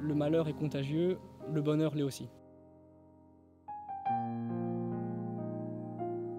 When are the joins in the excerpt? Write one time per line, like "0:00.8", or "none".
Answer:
0:02.2